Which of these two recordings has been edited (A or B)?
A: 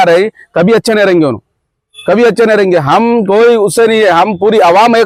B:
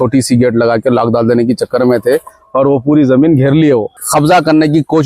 B